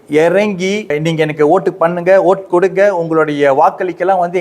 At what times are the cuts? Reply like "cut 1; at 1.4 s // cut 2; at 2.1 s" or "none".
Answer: cut 1; at 1.0 s